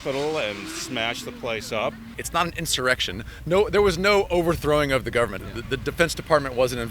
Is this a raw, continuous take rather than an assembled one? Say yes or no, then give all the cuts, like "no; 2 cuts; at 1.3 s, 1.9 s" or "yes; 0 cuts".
no; 2 cuts; at 2.2 s, 5.4 s